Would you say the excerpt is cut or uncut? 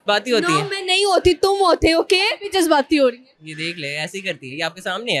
uncut